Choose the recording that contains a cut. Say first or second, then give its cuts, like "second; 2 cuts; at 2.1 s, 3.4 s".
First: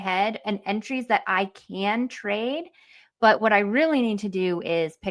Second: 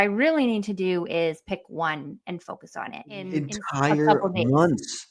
second; 1 cut; at 3.3 s